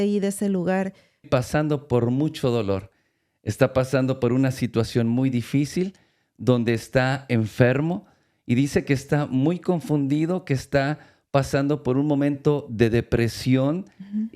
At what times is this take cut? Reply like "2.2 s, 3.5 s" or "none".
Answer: 1.3 s